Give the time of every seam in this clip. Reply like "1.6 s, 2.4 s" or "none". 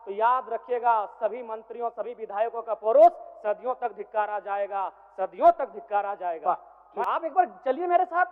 7.0 s